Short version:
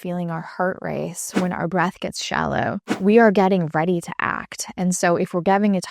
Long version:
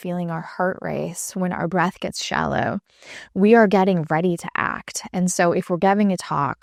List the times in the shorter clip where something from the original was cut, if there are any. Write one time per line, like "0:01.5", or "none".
0:02.9

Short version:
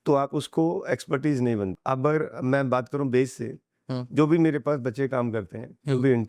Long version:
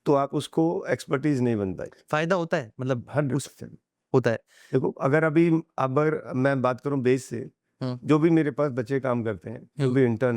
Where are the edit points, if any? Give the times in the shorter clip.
0:01.8

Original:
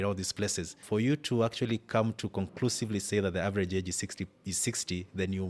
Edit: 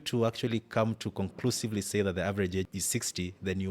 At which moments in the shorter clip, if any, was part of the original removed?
0:02.7

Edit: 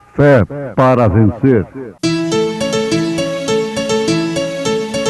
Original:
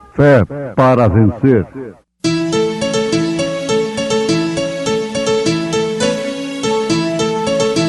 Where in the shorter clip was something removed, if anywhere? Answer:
0:01.8

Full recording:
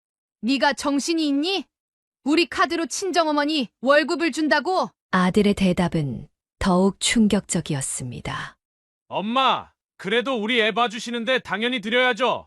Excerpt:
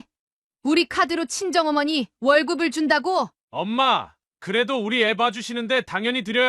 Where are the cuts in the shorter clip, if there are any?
0:03.4

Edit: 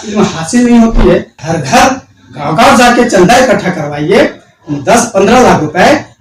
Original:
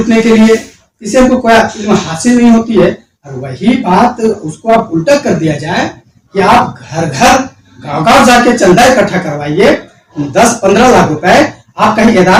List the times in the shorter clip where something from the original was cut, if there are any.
0:01.4

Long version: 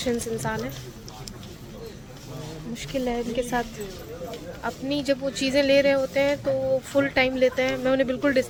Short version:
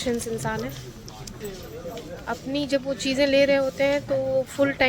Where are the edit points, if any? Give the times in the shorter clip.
0:01.4

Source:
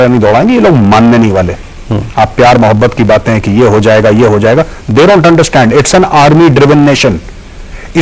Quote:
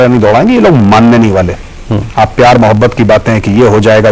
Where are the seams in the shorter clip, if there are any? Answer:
none

